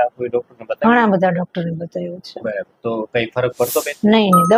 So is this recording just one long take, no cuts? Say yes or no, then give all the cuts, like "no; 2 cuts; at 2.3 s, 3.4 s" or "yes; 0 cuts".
yes; 0 cuts